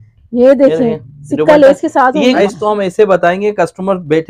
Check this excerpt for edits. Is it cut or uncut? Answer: cut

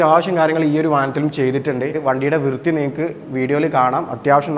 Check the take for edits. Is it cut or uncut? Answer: cut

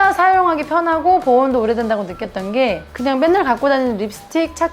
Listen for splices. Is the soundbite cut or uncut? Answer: cut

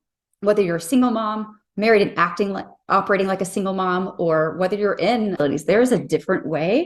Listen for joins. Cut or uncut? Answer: cut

